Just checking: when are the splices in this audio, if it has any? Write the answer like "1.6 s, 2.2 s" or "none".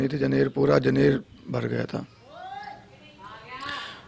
none